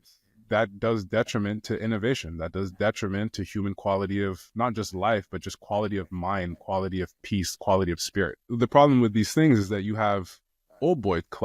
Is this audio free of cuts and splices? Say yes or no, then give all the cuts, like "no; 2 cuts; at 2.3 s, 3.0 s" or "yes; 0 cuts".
no; 1 cut; at 8.5 s